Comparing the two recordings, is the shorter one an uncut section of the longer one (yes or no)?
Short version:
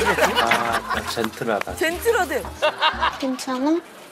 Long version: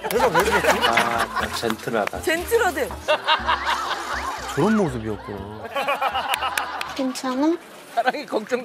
no